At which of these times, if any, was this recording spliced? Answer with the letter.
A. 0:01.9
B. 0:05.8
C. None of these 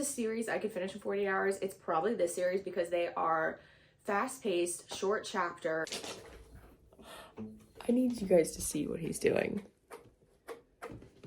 B